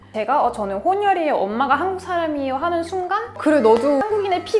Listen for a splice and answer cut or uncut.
cut